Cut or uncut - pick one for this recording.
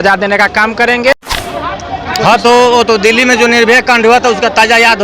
cut